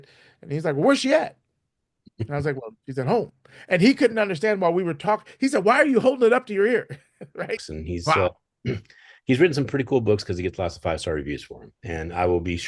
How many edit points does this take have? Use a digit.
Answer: 1